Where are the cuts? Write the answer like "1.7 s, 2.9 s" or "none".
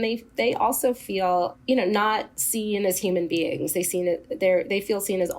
1.5 s